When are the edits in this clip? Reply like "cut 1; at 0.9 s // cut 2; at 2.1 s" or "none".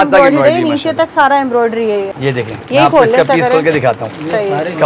cut 1; at 2.1 s